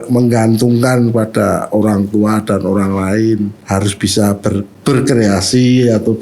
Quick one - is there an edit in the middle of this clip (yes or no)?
yes